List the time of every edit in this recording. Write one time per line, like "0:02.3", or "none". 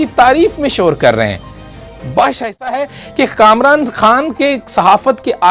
0:02.7